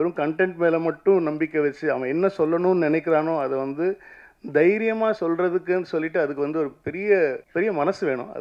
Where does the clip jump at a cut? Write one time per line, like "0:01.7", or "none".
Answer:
0:07.4